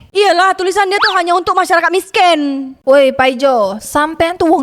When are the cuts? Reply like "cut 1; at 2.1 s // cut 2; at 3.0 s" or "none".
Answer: cut 1; at 2.7 s